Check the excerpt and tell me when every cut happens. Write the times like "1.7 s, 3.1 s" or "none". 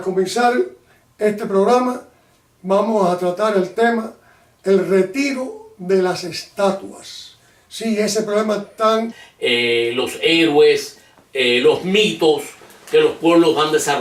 none